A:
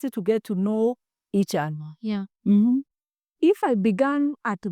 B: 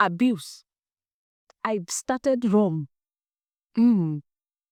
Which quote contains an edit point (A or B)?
A